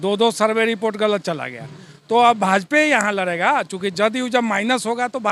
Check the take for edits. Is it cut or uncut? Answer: uncut